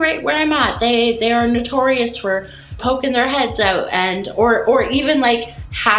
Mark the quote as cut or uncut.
cut